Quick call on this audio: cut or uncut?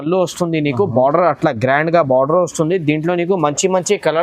uncut